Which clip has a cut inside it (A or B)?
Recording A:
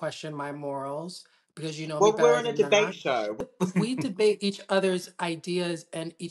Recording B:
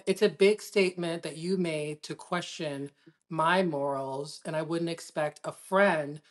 A